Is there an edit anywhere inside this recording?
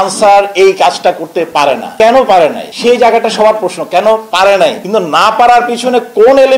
no; 0 cuts

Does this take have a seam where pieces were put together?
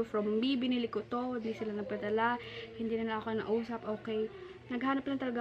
no; 0 cuts

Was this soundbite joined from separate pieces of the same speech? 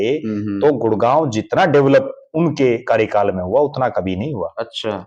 no; 0 cuts

